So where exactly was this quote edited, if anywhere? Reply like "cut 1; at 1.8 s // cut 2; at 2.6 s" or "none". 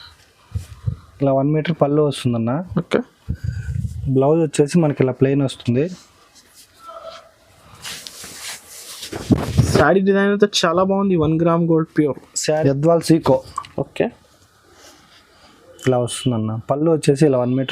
cut 1; at 12.3 s